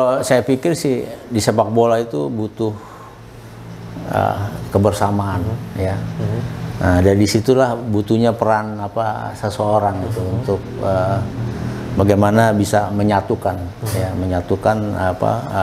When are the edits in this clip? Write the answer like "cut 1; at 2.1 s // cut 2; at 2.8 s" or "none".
none